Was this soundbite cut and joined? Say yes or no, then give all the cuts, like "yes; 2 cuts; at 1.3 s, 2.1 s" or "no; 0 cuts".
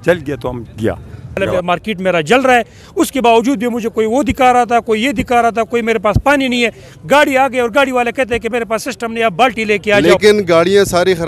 yes; 2 cuts; at 1.4 s, 9.9 s